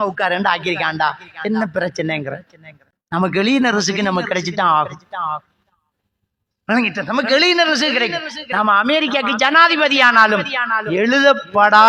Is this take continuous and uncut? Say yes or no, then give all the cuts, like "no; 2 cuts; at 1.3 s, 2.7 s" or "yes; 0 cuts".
yes; 0 cuts